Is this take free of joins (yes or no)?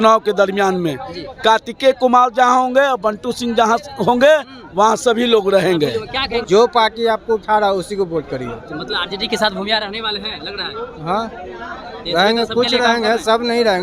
no